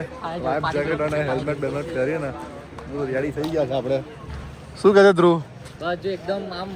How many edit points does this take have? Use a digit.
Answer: 0